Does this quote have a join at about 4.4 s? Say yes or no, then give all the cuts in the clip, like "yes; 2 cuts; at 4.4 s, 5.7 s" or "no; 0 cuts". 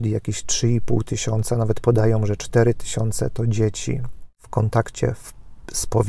yes; 1 cut; at 4.4 s